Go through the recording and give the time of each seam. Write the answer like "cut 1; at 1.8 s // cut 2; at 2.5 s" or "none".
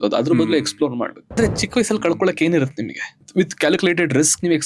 cut 1; at 1.4 s // cut 2; at 3.3 s